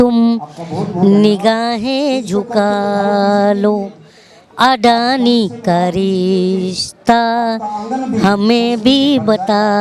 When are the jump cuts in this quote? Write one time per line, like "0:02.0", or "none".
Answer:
none